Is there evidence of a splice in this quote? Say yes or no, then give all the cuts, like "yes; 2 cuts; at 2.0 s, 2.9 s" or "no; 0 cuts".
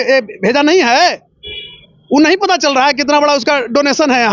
no; 0 cuts